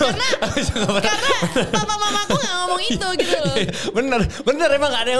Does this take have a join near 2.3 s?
no; 0 cuts

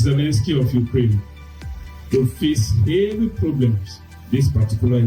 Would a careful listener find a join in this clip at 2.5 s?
no; 1 cut; at 4.1 s

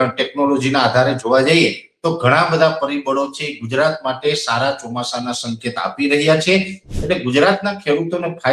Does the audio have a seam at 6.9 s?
yes; 1 cut; at 6.9 s

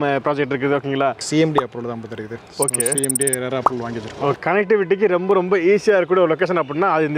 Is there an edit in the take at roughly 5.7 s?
no; 2 cuts; at 1.2 s, 4.4 s

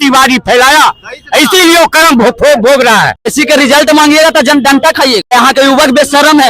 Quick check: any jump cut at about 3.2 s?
yes; 2 cuts; at 3.2 s, 5.3 s

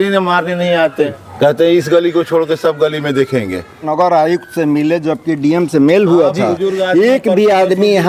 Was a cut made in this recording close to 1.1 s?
yes; 2 cuts; at 1.1 s, 3.9 s

